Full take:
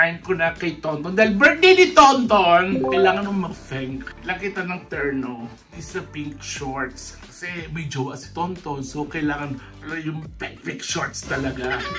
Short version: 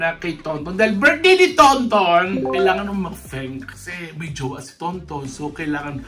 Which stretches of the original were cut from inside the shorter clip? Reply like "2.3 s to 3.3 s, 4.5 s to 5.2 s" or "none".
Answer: 4.1 s to 7.3 s